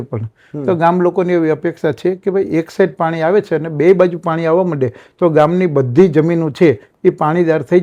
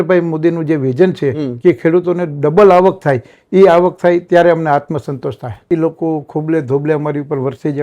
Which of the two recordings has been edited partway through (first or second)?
second